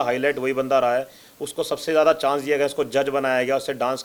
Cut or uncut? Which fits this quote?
uncut